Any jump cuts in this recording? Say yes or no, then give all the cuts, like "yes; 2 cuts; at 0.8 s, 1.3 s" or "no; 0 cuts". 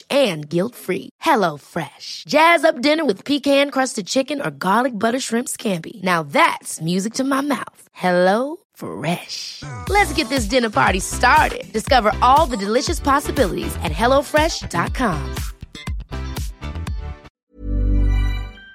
yes; 1 cut; at 17.3 s